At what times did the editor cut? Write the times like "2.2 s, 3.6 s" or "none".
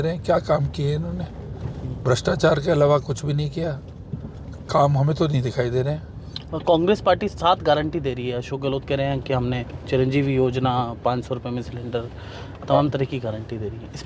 none